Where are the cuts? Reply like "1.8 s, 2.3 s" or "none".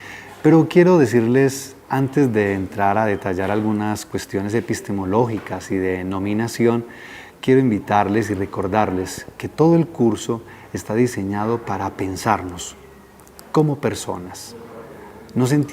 3.2 s

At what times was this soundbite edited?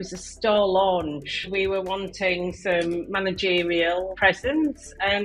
1.5 s, 4.1 s

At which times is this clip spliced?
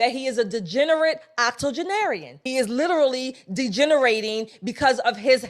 2.4 s

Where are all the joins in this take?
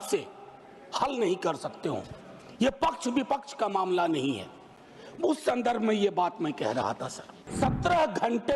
7.5 s

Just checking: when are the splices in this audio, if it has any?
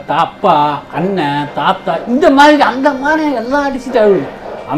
none

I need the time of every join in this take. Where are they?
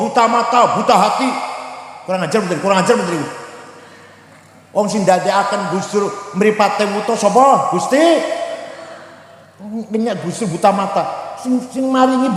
none

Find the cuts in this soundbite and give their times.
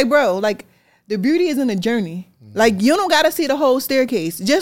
none

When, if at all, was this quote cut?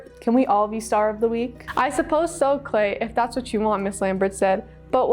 1.6 s

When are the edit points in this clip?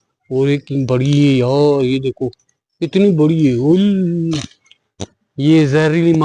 none

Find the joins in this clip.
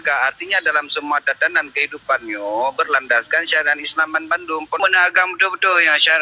4.8 s

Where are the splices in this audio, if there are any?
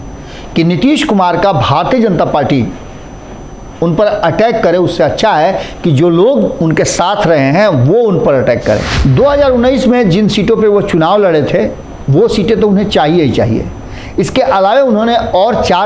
8.9 s

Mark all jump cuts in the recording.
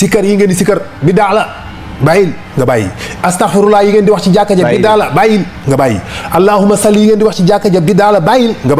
none

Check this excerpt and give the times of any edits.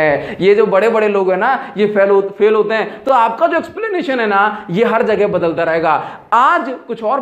none

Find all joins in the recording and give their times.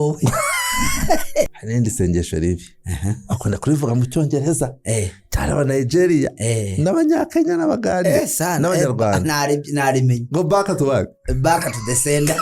1.5 s

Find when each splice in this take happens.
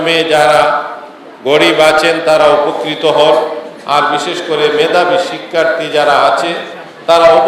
none

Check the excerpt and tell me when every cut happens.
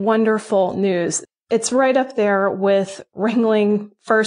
1.2 s

